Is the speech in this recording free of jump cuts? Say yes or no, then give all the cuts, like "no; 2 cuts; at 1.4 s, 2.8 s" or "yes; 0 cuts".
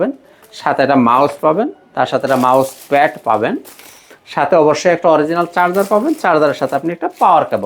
yes; 0 cuts